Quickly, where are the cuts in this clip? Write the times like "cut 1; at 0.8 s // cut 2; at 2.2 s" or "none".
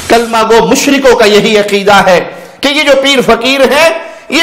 none